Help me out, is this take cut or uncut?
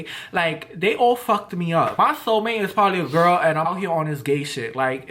cut